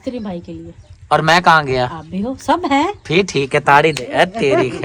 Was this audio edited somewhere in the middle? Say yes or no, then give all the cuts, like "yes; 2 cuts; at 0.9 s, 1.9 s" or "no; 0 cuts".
no; 0 cuts